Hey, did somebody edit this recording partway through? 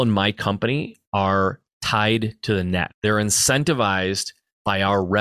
yes; 2 cuts; at 1.0 s, 2.9 s

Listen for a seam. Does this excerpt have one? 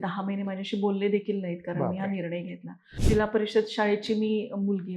yes; 1 cut; at 2.9 s

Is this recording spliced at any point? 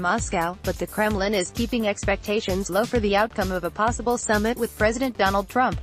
no; 0 cuts

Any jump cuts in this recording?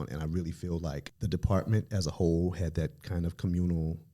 yes; 1 cut; at 1.1 s

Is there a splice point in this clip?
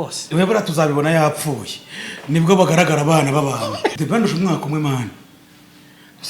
yes; 1 cut; at 3.9 s

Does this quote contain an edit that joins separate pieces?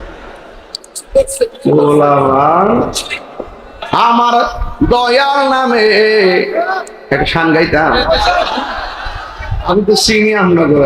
yes; 1 cut; at 3.9 s

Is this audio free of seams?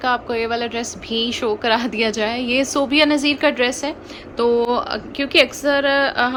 yes; 0 cuts

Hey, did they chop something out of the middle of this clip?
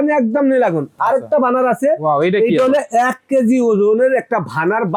no; 0 cuts

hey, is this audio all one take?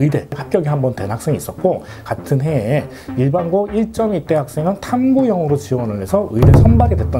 yes; 0 cuts

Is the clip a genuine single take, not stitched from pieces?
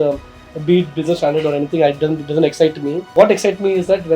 no; 1 cut; at 3.1 s

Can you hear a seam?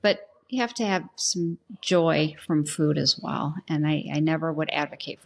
no; 0 cuts

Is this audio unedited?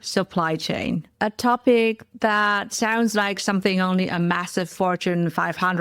no; 1 cut; at 1.1 s

